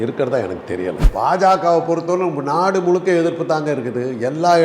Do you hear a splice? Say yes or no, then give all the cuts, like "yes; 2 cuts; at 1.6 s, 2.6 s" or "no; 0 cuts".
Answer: yes; 1 cut; at 1.0 s